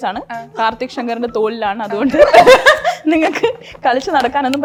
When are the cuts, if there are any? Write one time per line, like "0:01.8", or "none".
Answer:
none

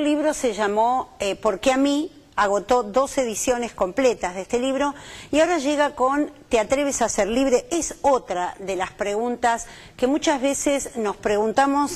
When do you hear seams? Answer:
none

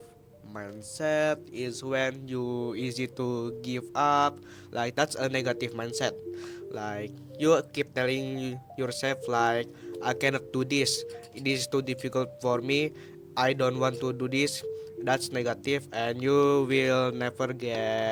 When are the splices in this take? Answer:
none

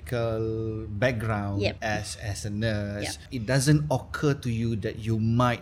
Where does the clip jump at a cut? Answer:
0:01.8
0:03.2

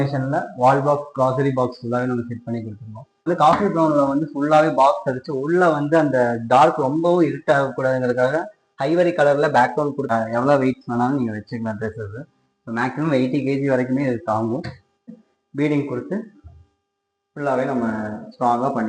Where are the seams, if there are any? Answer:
0:03.3
0:10.1
0:15.1

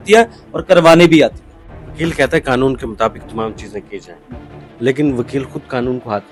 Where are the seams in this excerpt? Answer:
none

